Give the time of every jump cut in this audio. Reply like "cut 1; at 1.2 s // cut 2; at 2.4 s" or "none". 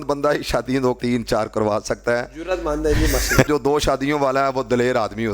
cut 1; at 1.0 s // cut 2; at 3.5 s